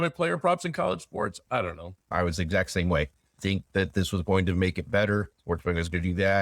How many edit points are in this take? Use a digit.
3